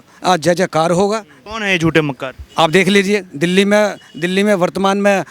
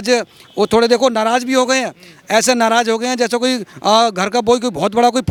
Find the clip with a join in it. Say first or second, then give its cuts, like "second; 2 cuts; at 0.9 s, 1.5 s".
first; 1 cut; at 1.3 s